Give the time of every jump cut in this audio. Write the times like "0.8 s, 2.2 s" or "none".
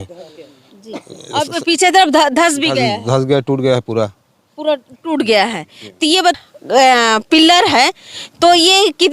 6.3 s